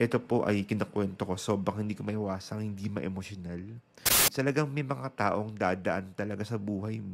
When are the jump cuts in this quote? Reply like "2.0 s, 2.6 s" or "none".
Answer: 4.3 s